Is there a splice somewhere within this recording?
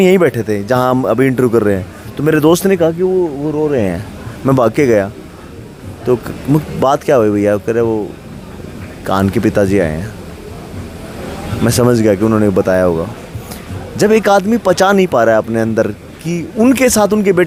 no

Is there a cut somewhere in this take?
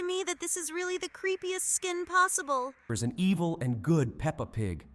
yes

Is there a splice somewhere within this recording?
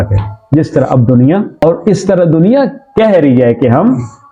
no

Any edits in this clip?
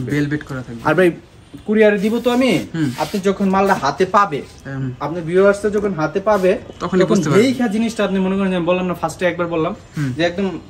no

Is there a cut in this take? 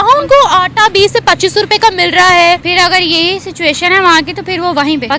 yes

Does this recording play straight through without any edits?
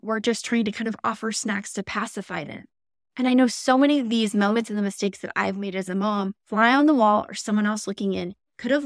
no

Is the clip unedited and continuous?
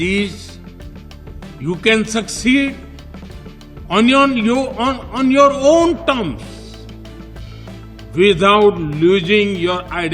no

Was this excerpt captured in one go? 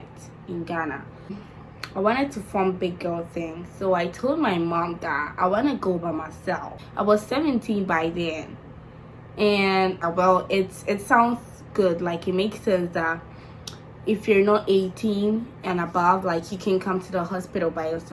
no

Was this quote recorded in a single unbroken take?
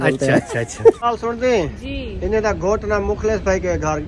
no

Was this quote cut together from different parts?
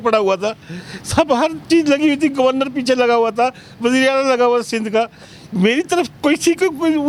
no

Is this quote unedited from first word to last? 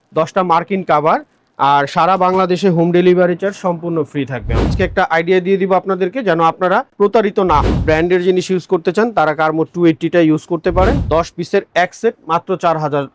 no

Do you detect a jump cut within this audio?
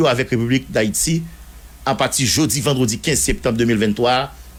no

